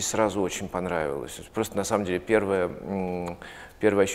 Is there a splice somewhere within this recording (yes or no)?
no